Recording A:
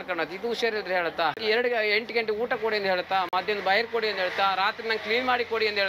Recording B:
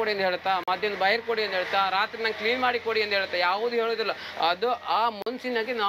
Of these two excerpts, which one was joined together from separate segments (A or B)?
A